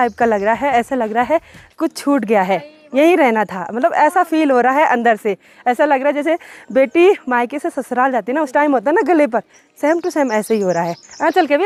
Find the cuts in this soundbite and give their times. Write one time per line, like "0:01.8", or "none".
none